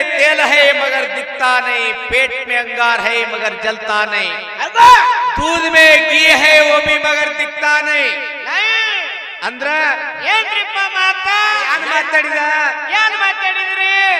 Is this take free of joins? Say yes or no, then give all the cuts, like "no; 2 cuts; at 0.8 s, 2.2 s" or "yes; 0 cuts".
no; 1 cut; at 11.7 s